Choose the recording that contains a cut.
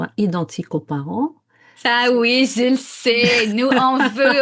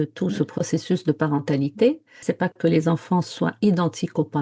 second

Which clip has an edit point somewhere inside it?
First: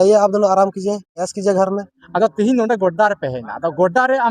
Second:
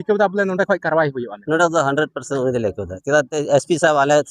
first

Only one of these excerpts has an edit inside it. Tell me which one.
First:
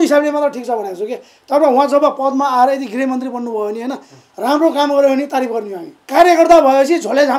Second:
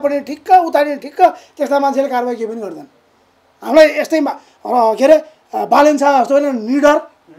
first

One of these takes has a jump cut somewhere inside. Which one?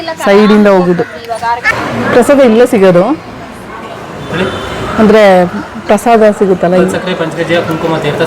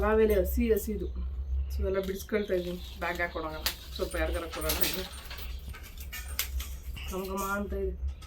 first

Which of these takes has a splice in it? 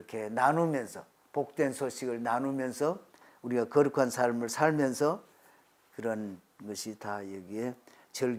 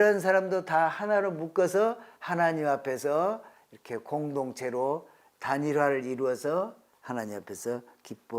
second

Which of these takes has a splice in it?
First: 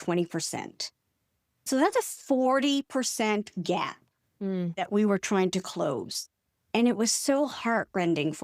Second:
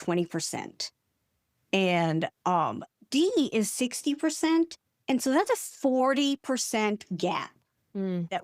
first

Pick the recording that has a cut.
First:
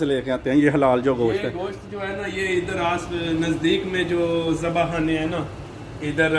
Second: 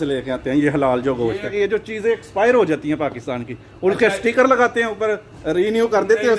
second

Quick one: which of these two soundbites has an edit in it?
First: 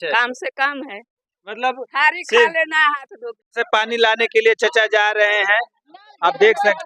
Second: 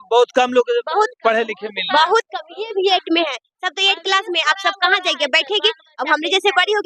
first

